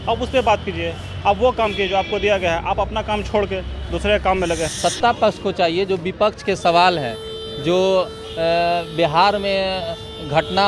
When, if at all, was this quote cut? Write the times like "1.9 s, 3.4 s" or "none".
4.7 s